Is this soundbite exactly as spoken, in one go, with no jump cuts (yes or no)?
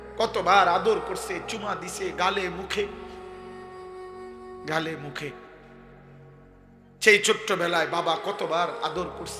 no